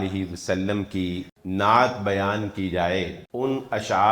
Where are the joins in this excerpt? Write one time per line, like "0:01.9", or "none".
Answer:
0:01.3
0:03.2

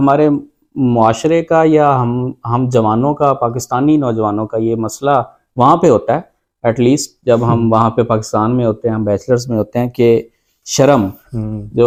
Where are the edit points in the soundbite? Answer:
none

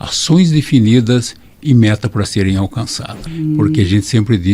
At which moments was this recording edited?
0:03.3

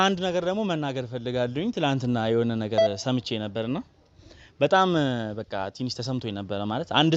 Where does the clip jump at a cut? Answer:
none

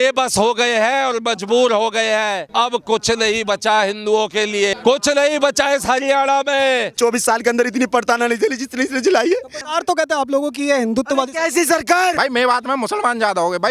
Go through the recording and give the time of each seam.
0:02.4
0:04.7
0:06.9
0:09.6
0:12.1

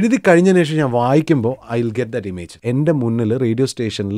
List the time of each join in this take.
0:02.5

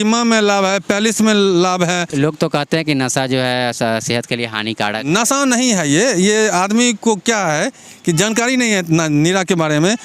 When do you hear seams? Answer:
0:02.1

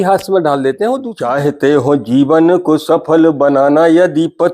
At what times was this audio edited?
0:01.1

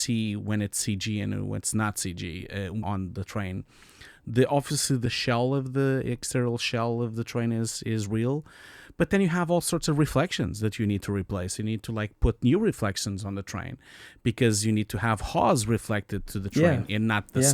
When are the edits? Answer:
0:02.8
0:05.0

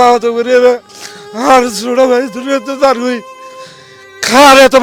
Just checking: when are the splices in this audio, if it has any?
none

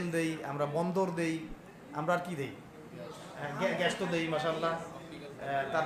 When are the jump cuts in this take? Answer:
none

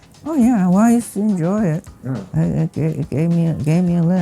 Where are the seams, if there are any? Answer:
none

